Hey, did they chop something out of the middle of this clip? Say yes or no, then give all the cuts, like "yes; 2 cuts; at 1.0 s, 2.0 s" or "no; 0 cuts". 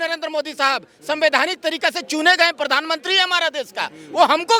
no; 0 cuts